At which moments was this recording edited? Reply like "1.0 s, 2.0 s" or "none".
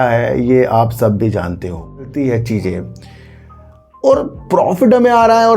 2.1 s